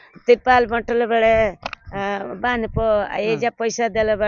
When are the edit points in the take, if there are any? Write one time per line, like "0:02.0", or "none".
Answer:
none